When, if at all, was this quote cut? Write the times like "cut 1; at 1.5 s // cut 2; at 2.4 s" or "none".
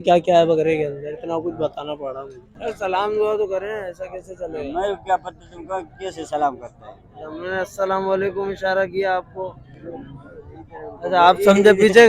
cut 1; at 2.4 s